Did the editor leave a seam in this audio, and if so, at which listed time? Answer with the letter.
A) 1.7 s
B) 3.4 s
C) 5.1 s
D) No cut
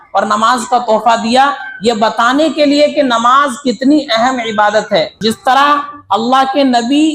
C